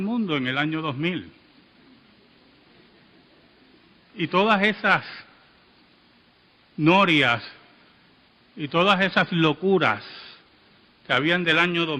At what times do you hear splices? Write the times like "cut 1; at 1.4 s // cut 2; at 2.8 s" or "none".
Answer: cut 1; at 3.5 s